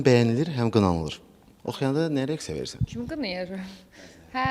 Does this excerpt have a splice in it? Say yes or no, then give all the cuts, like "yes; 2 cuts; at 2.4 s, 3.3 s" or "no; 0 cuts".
no; 0 cuts